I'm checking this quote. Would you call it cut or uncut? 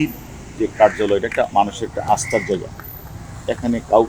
uncut